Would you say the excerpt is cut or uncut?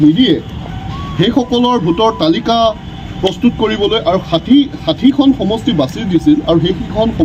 uncut